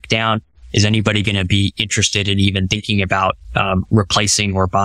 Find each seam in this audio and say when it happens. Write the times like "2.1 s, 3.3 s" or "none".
none